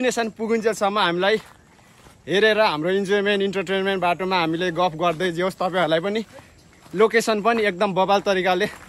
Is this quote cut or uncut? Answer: uncut